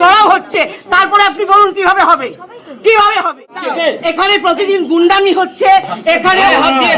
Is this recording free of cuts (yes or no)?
no